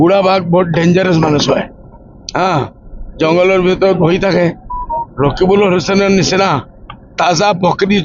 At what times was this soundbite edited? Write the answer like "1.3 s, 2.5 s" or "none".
none